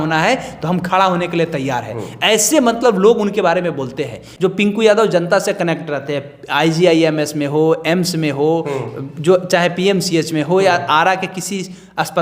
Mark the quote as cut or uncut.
cut